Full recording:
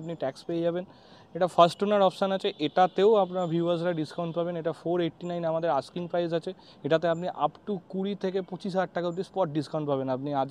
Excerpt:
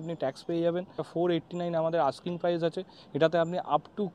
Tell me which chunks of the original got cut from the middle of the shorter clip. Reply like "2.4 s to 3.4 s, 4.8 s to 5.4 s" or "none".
1.1 s to 4.7 s